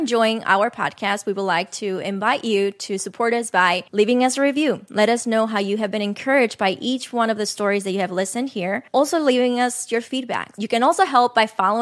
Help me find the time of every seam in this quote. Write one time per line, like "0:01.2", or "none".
none